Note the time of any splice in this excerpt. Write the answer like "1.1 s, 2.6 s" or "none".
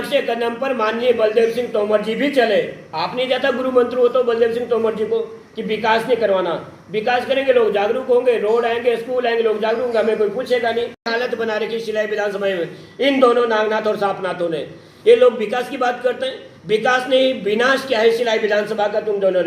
2.9 s, 11.1 s